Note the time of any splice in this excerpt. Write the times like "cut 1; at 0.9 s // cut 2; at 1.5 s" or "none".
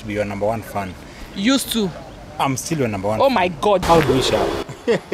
cut 1; at 3.8 s

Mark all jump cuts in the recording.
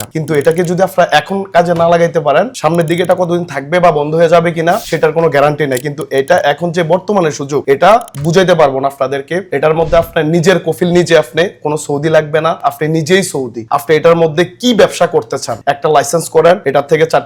none

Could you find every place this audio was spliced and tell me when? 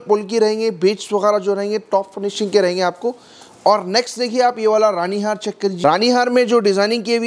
none

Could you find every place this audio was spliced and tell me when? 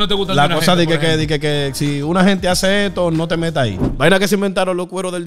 cut 1; at 3.9 s

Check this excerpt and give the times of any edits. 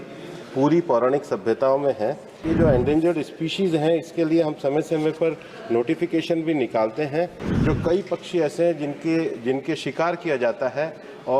cut 1; at 2.4 s // cut 2; at 7.5 s

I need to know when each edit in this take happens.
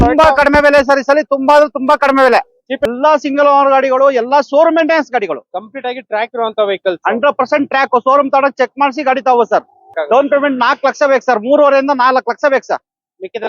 cut 1; at 2.9 s // cut 2; at 9.9 s

